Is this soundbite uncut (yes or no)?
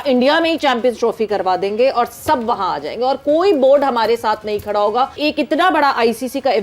no